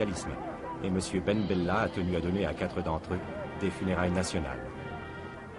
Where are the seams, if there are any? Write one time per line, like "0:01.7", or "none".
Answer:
0:03.8